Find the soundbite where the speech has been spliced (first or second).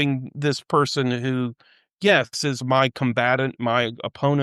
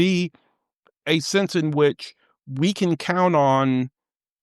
second